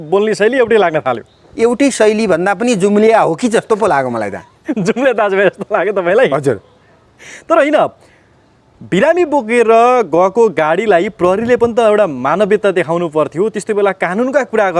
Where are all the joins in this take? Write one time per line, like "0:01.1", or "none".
0:01.4